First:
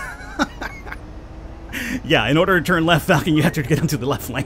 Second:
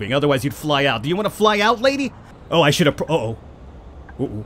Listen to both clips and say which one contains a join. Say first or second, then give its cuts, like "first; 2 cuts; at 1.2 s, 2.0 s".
second; 1 cut; at 2.2 s